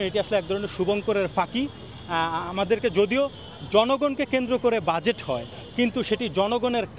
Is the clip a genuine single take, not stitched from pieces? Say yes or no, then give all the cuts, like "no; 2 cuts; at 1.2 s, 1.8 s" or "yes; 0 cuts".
yes; 0 cuts